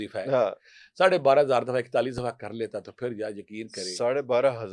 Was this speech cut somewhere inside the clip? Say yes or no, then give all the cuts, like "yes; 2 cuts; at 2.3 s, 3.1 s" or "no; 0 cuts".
no; 0 cuts